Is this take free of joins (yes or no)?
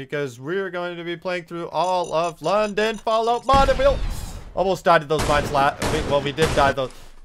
yes